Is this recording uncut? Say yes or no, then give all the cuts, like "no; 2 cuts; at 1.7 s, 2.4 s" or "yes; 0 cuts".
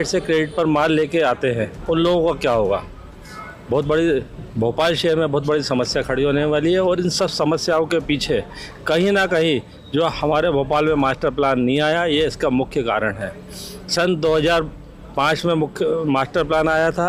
yes; 0 cuts